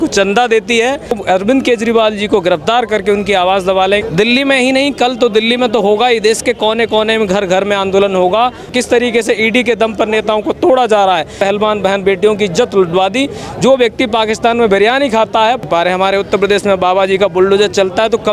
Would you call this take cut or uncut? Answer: cut